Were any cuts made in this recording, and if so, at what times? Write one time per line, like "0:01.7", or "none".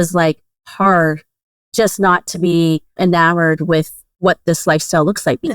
0:02.9
0:04.0